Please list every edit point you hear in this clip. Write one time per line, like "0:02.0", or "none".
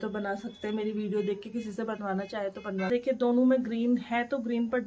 0:02.9